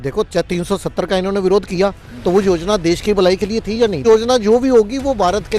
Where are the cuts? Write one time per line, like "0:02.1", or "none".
0:04.0